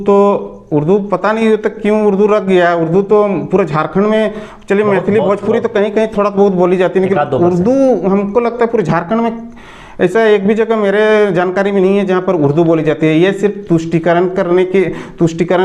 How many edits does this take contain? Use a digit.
0